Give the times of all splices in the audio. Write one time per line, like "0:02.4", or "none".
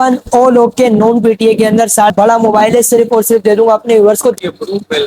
0:02.1
0:04.4